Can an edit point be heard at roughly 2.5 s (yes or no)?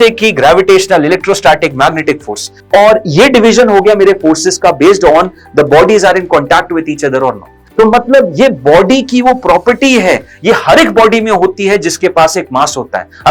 yes